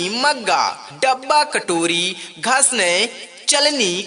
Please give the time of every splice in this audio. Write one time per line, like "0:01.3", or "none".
none